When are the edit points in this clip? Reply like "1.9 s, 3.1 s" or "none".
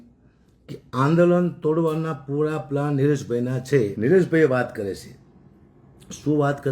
3.9 s